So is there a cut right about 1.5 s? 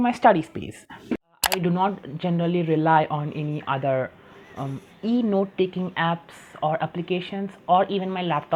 yes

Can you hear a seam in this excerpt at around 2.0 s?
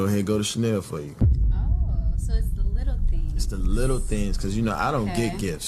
no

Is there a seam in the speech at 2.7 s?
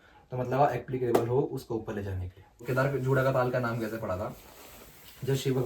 yes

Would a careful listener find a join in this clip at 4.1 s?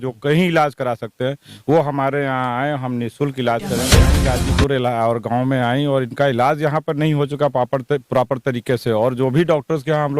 yes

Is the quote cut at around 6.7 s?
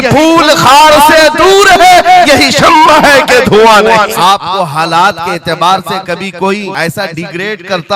yes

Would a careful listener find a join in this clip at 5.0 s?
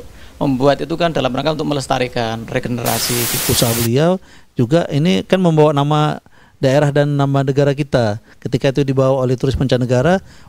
no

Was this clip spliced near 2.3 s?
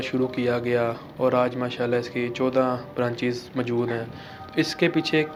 no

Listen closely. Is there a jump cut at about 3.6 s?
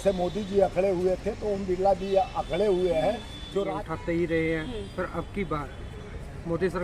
yes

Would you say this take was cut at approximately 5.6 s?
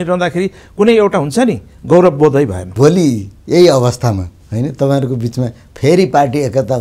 no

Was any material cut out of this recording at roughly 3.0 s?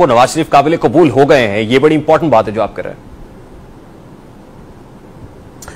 no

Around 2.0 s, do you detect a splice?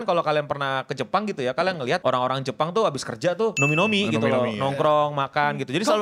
yes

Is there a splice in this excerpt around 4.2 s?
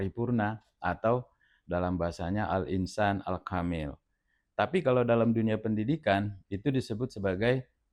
no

